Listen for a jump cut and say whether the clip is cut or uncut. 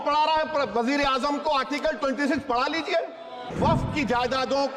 cut